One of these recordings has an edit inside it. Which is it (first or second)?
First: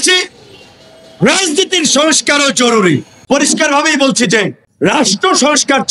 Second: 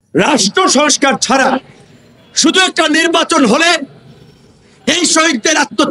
first